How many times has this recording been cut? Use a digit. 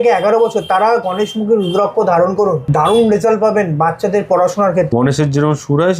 2